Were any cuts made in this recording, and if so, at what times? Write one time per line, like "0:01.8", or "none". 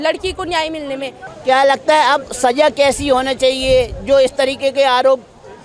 0:01.3